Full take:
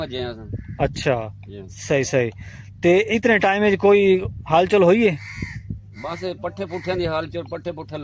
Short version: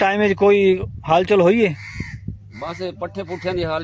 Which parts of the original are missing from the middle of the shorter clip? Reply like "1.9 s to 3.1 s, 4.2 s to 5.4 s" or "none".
none